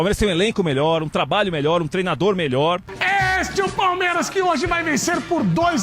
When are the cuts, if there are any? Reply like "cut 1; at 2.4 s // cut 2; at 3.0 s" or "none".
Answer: cut 1; at 2.9 s